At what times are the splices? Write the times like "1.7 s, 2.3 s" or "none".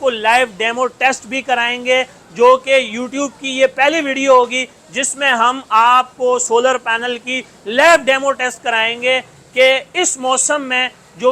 none